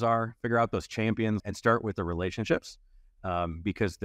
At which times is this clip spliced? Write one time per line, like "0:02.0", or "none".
0:01.4